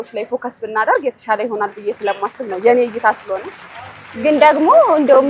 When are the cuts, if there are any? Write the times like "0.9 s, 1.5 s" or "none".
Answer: none